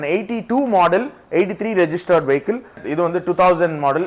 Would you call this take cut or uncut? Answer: cut